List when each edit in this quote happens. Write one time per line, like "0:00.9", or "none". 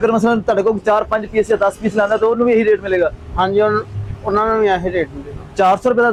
none